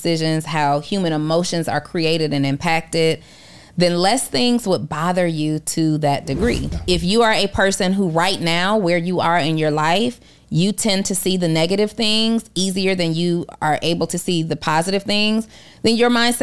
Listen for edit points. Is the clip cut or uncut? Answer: cut